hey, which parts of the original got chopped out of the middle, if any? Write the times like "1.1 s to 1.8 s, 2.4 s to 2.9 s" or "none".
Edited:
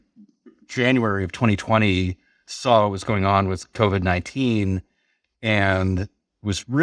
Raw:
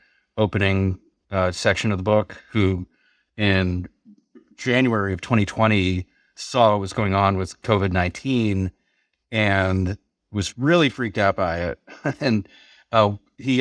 none